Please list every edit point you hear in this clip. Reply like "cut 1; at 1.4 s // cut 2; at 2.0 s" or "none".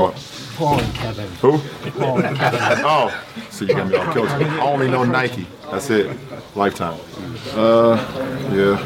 cut 1; at 7.5 s

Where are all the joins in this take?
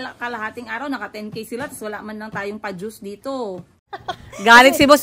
cut 1; at 3.8 s

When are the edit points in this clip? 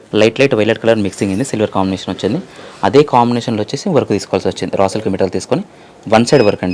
none

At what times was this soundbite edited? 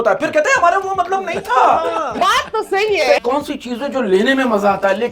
cut 1; at 2.1 s // cut 2; at 3.2 s

